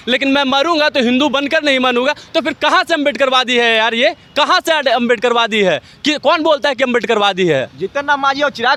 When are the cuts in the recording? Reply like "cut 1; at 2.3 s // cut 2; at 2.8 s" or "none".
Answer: none